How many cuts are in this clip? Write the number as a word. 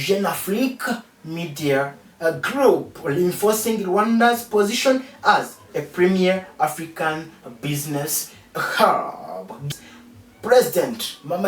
one